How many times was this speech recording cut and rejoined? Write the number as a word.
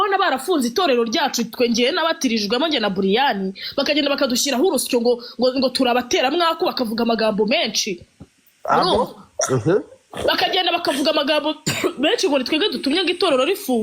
zero